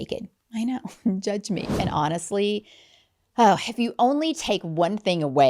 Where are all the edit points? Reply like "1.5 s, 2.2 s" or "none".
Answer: 1.8 s

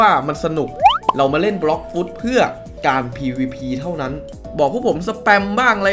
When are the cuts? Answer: 4.1 s

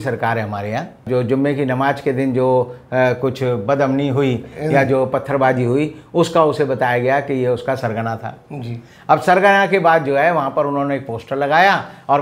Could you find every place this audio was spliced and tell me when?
1.0 s

